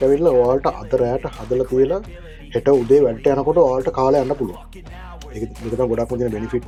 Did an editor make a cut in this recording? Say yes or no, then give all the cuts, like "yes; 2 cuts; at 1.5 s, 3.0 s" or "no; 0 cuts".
no; 0 cuts